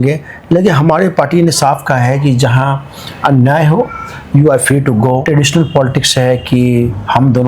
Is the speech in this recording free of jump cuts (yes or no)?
no